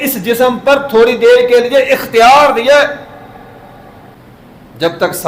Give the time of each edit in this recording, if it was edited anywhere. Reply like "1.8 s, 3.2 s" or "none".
4.2 s